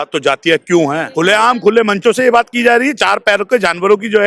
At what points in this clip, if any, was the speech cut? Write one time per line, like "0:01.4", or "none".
0:01.0